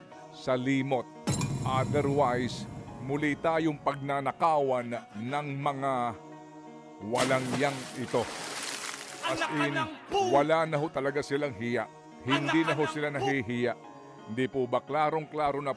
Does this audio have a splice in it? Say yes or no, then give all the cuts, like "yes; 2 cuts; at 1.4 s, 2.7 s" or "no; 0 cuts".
no; 0 cuts